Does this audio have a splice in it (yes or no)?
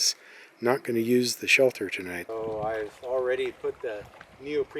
yes